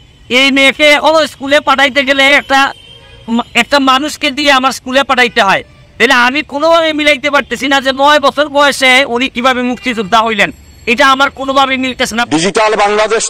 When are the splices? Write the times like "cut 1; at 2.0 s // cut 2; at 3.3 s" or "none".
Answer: cut 1; at 12.2 s